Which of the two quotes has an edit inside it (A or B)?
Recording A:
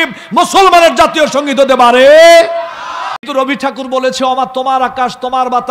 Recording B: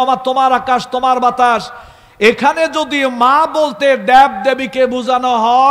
A